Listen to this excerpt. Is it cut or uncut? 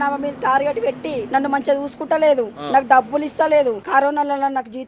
cut